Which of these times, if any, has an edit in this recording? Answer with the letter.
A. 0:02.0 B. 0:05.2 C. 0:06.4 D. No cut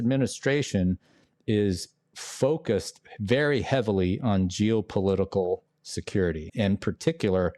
C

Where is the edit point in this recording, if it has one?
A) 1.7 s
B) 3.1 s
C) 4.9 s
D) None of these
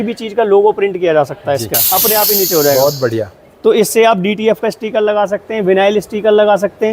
A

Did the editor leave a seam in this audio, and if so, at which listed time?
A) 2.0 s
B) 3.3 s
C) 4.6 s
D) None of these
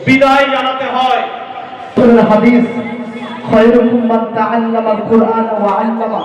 A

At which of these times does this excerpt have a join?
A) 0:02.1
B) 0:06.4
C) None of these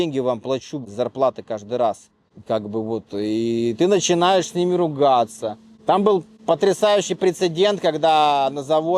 C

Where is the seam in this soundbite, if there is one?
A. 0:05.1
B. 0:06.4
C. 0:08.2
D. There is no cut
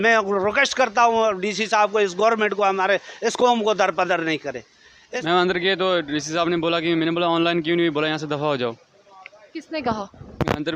A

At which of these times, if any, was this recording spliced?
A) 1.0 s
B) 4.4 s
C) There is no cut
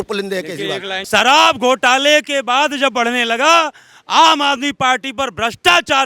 A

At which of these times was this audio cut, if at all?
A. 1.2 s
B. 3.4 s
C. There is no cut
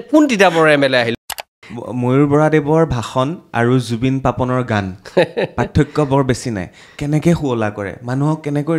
A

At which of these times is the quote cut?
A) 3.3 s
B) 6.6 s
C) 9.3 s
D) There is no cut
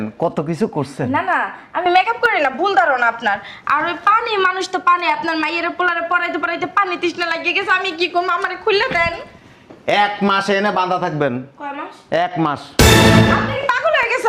D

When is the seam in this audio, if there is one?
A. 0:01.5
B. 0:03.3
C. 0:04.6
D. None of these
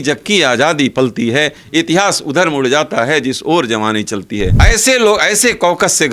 C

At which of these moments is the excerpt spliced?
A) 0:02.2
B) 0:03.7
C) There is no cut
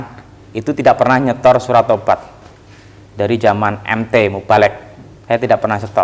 C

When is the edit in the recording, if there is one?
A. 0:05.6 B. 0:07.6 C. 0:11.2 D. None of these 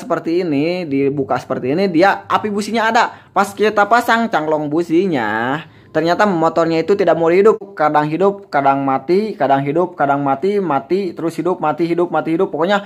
B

